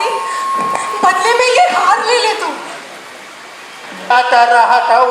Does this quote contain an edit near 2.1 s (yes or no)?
no